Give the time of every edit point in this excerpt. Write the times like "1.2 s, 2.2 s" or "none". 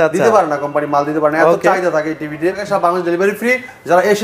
2.6 s